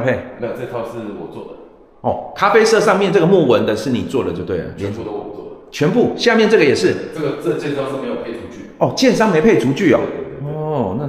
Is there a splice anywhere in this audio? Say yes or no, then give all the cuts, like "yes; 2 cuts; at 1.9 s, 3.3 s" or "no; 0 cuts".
no; 0 cuts